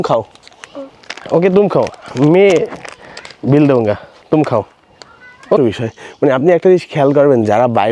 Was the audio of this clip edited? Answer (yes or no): yes